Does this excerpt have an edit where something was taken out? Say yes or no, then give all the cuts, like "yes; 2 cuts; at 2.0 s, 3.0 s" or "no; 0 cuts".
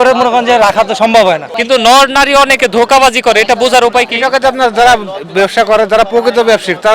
yes; 1 cut; at 1.5 s